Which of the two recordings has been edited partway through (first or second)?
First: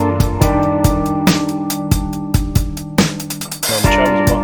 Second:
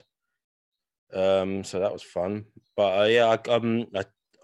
first